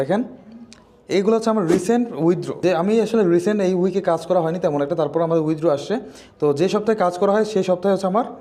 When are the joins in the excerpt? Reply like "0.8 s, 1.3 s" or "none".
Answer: 2.5 s